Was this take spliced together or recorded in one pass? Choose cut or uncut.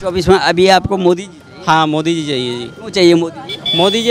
uncut